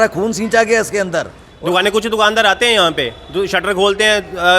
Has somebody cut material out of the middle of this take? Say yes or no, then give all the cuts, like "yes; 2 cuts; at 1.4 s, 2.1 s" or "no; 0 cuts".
yes; 1 cut; at 1.4 s